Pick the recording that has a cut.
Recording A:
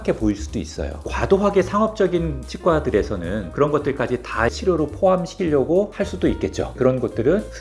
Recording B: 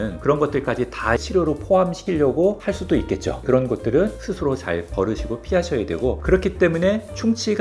A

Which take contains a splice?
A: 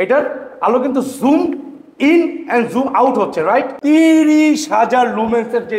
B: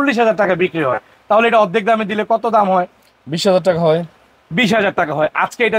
A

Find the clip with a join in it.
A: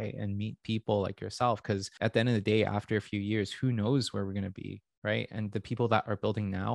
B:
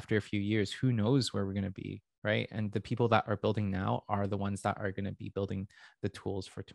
A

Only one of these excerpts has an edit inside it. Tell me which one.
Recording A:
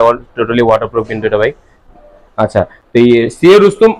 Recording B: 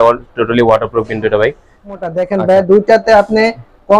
B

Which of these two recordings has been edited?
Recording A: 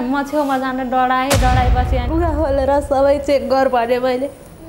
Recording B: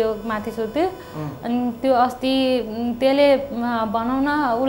A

